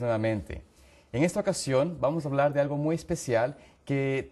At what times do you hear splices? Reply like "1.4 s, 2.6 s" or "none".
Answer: 2.2 s